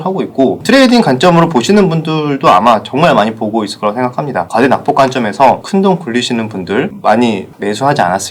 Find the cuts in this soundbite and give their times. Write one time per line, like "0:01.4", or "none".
0:04.5
0:05.6
0:06.9